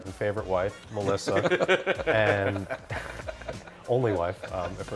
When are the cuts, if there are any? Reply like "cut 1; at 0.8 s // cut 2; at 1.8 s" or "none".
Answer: none